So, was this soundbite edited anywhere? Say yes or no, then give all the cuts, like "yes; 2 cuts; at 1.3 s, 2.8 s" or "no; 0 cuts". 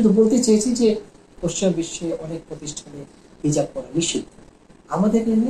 yes; 1 cut; at 1.4 s